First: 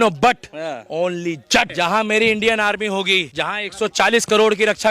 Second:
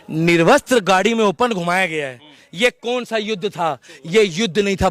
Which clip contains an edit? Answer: first; 2 cuts; at 1.7 s, 3.3 s

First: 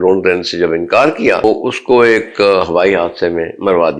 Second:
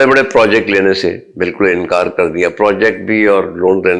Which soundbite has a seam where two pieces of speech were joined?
first; 1 cut; at 1.4 s

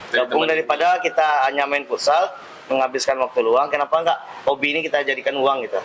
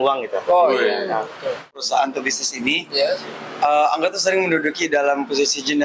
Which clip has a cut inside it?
second; 1 cut; at 1.8 s

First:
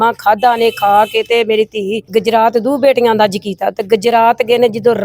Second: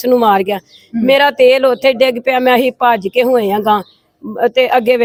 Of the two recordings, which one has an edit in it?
first; 1 cut; at 2.0 s

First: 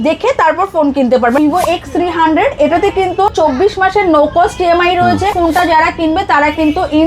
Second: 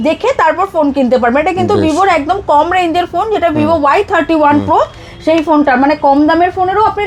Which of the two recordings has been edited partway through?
first; 3 cuts; at 1.4 s, 3.3 s, 5.3 s

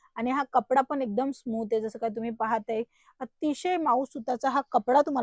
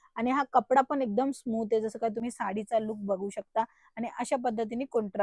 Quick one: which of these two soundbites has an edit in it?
second; 1 cut; at 2.2 s

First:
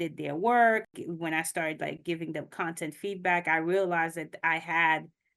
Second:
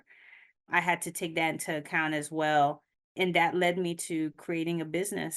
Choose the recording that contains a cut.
first; 1 cut; at 0.9 s

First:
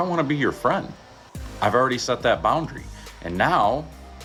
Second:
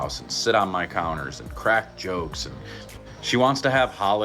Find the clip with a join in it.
second; 1 cut; at 2.9 s

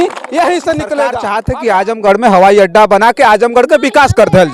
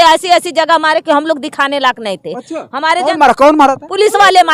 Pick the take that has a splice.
first; 1 cut; at 1.3 s

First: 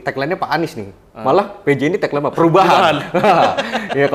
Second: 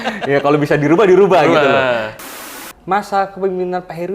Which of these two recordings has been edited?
second; 1 cut; at 2.4 s

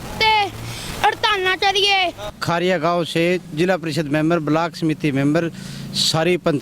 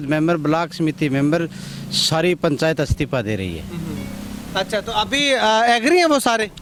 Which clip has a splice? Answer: first; 1 cut; at 2.3 s

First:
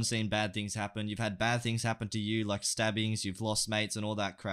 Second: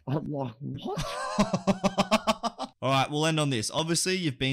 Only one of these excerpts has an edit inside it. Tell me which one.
second; 1 cut; at 2.6 s

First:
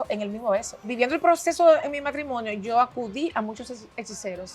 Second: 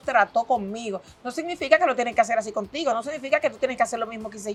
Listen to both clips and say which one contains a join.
first; 1 cut; at 0.9 s

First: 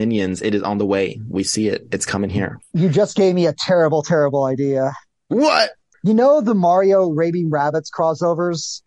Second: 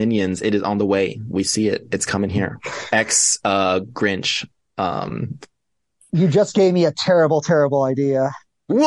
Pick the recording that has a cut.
first; 2 cuts; at 2.6 s, 5.8 s

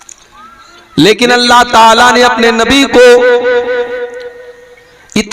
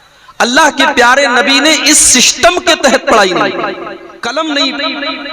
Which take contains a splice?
second; 1 cut; at 4.1 s

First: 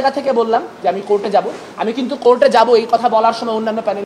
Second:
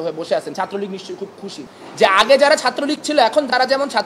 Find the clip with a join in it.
second; 1 cut; at 1.7 s

